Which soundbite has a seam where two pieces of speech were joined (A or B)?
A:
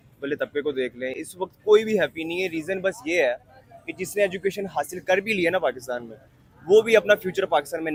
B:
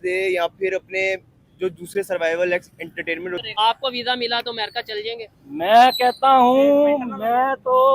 B